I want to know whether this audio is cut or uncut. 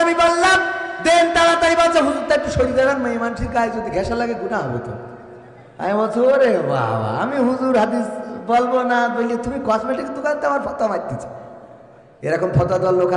uncut